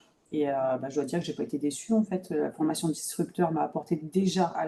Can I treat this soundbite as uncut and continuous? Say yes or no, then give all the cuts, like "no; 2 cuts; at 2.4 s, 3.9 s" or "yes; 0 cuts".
yes; 0 cuts